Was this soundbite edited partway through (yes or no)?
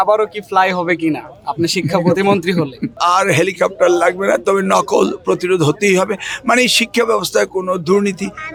no